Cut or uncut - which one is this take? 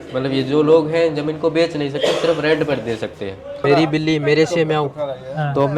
cut